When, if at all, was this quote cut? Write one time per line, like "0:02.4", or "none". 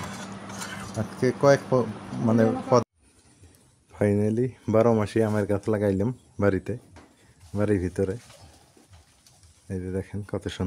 0:02.8